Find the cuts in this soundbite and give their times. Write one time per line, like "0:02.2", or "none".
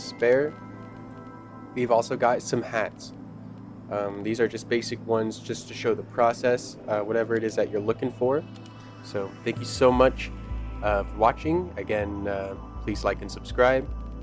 0:08.9